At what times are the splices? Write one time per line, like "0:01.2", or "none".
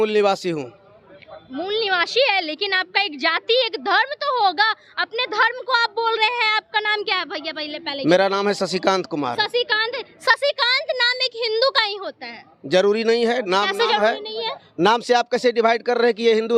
none

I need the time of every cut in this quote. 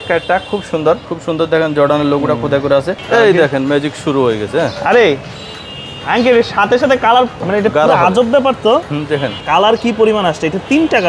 0:01.1
0:03.0
0:07.4
0:09.4

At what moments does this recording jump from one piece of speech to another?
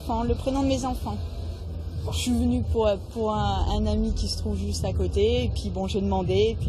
0:03.4

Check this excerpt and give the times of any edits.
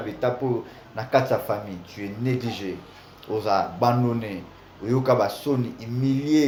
none

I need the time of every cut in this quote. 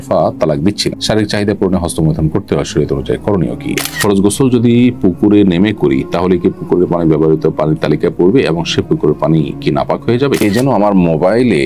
0:03.8
0:10.4

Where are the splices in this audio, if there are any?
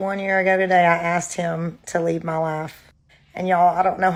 none

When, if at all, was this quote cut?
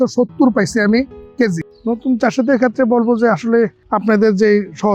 0:01.7
0:03.8

